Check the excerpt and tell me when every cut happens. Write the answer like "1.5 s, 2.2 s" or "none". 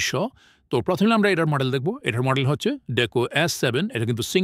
none

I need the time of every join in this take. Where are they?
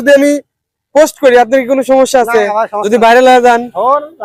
none

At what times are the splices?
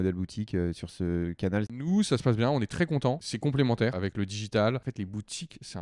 1.8 s, 3.3 s, 4.0 s, 4.9 s

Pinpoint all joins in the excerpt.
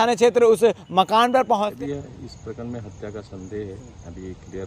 1.7 s

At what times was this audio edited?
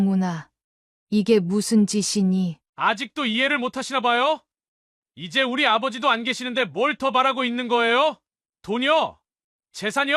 none

